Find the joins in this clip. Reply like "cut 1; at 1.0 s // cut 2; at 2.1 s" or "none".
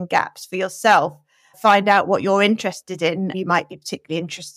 cut 1; at 1.6 s // cut 2; at 3.3 s